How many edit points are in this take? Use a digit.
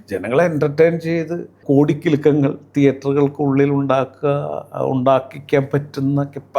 1